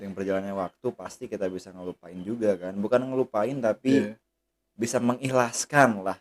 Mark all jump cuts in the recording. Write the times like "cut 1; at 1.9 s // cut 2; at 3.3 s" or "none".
none